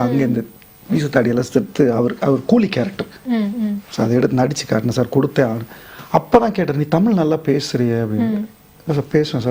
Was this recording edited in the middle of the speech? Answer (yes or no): no